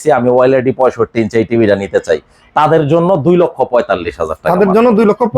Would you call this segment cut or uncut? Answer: uncut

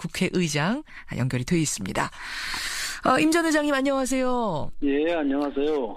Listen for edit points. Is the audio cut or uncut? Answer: uncut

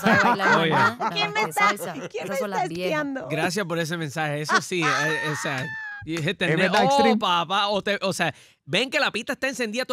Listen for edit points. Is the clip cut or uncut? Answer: uncut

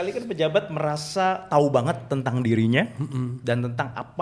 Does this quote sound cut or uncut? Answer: uncut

